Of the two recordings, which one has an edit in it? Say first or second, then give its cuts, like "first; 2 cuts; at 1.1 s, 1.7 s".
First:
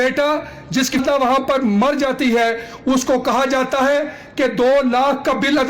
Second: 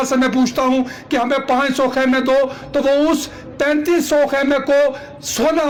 first; 1 cut; at 1.0 s